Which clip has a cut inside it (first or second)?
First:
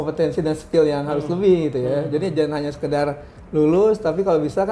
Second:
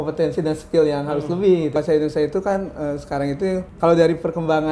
second